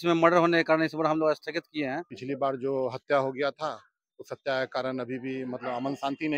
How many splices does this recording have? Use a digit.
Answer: 1